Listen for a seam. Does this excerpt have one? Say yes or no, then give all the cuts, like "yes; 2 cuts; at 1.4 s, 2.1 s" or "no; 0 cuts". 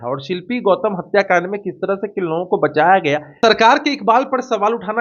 yes; 1 cut; at 3.4 s